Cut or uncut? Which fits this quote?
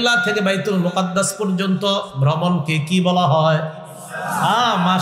uncut